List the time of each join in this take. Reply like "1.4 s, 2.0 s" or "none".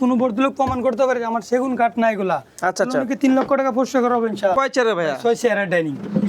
4.6 s